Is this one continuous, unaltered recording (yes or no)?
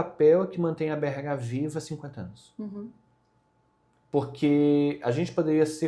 yes